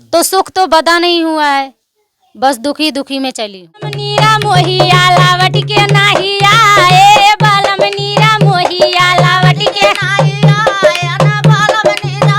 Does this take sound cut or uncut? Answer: cut